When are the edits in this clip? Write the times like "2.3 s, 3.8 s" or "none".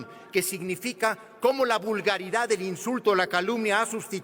none